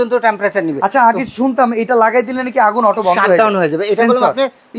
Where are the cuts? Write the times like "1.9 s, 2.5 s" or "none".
none